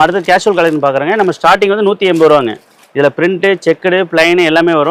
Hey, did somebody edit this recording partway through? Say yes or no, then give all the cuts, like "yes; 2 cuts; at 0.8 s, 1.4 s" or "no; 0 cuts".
no; 0 cuts